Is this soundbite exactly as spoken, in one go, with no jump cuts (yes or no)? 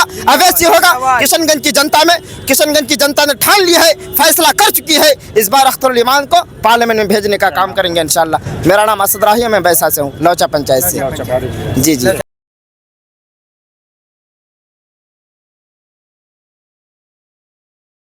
yes